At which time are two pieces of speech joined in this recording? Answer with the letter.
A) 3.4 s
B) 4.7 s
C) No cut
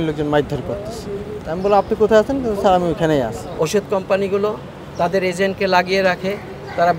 A